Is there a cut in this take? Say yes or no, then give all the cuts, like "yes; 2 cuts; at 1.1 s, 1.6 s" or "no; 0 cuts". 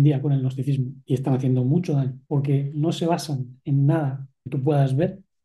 yes; 2 cuts; at 0.9 s, 2.2 s